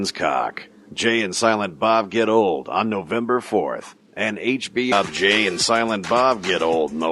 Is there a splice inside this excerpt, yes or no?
no